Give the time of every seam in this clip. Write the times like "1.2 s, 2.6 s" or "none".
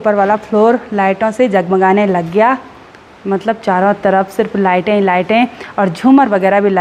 none